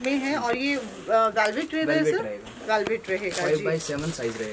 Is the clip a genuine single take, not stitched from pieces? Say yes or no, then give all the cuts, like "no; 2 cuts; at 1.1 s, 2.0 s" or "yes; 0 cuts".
yes; 0 cuts